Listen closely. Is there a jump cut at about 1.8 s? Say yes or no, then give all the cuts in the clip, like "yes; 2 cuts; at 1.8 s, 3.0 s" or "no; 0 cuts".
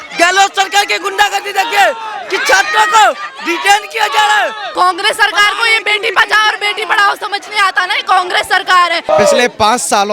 no; 2 cuts; at 4.6 s, 9.1 s